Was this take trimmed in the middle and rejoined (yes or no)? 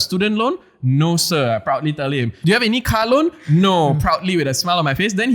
yes